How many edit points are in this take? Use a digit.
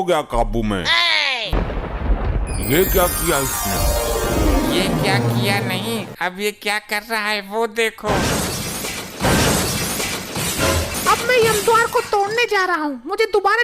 2